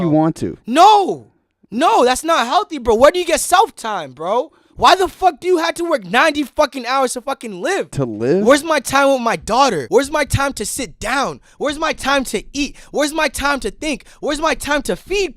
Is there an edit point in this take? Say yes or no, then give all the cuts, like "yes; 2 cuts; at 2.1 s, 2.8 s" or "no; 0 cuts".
yes; 2 cuts; at 7.9 s, 9.8 s